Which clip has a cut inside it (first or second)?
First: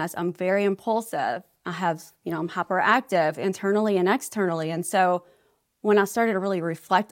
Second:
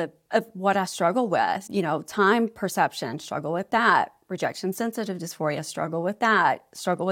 second